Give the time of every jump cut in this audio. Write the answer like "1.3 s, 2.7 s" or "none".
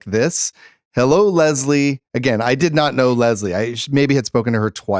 2.6 s